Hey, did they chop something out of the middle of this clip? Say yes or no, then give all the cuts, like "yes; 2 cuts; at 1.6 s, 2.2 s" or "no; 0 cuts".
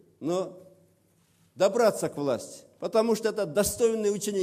yes; 1 cut; at 1.8 s